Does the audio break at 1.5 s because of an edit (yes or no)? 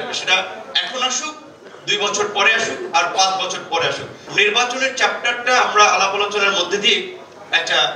no